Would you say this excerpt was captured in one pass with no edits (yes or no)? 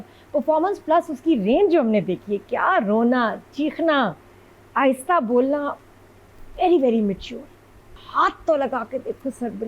no